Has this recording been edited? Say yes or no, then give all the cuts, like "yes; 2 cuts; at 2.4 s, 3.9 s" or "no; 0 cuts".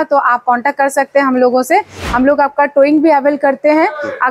no; 0 cuts